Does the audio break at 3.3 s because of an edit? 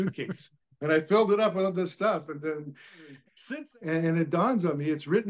yes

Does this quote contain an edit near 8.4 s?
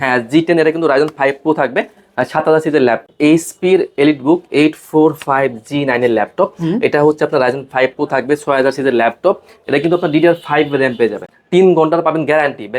no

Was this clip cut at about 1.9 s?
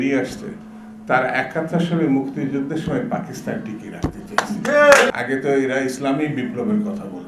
no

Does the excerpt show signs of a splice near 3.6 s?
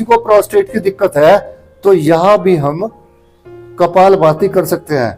no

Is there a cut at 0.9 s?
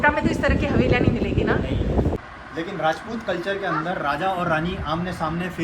no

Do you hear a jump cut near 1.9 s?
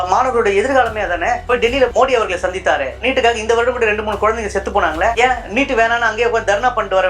yes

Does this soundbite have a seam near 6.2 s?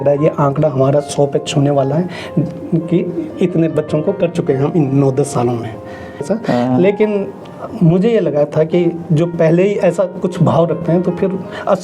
yes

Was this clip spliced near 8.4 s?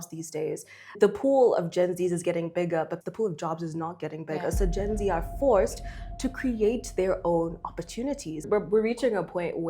yes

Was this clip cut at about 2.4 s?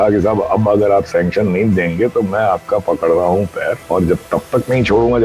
no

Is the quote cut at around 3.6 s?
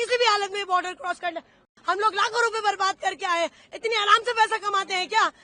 no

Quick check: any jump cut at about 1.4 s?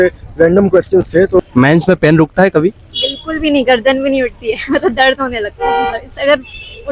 yes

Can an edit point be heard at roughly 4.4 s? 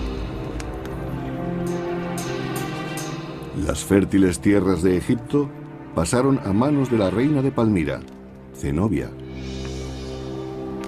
yes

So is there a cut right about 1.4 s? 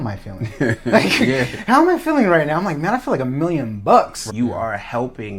no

